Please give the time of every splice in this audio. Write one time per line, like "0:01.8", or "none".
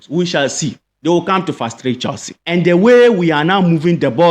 0:02.3